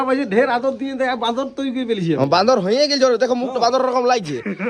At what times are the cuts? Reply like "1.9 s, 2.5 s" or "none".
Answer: none